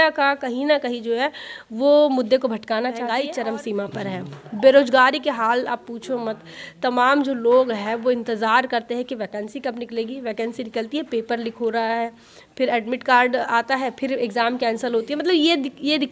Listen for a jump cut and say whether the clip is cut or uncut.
cut